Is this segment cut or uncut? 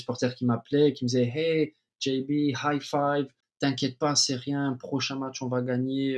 cut